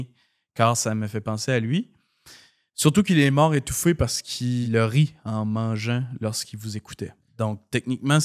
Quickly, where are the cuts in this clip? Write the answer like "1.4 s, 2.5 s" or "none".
4.6 s, 7.2 s